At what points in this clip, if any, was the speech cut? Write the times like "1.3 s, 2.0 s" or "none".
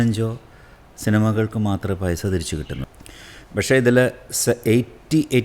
2.9 s